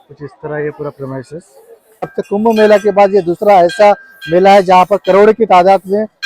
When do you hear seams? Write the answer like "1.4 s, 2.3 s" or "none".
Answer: 2.2 s